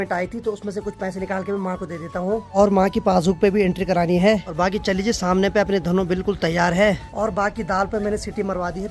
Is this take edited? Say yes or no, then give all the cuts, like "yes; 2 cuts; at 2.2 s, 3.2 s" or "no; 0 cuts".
no; 0 cuts